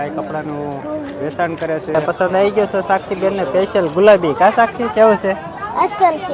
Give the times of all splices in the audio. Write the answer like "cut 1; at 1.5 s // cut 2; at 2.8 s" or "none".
cut 1; at 1.9 s